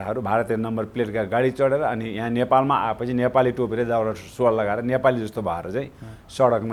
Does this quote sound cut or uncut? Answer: uncut